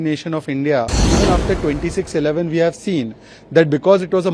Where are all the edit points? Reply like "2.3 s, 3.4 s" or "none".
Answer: 1.0 s